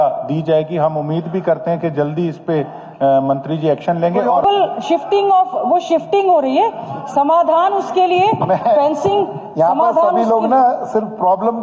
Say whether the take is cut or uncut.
cut